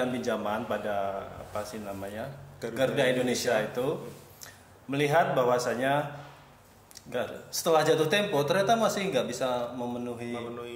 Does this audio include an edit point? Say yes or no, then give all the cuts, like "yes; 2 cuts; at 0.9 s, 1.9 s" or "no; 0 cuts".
no; 0 cuts